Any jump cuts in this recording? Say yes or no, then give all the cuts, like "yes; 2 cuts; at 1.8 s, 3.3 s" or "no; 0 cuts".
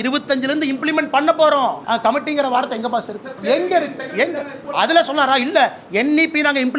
yes; 3 cuts; at 1.8 s, 3.3 s, 4.6 s